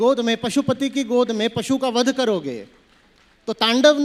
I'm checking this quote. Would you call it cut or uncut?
uncut